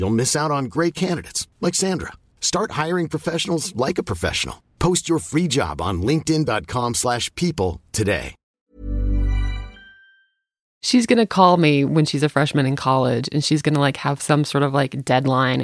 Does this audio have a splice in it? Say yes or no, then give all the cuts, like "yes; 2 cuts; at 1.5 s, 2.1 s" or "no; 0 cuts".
yes; 1 cut; at 10.8 s